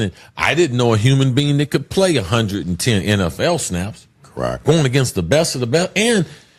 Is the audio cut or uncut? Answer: cut